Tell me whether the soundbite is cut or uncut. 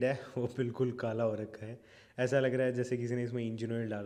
uncut